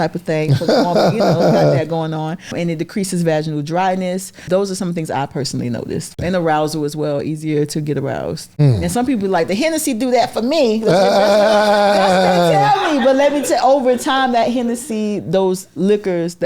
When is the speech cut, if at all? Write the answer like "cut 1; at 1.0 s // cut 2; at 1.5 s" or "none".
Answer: cut 1; at 2.5 s // cut 2; at 4.4 s // cut 3; at 6.2 s // cut 4; at 8.5 s

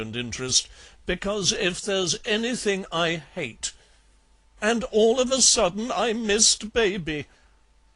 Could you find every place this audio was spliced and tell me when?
cut 1; at 6.6 s

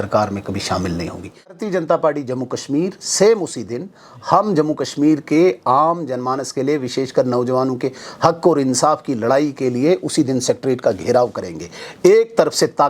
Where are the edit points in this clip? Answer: cut 1; at 1.6 s

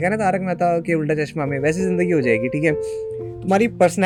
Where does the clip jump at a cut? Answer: none

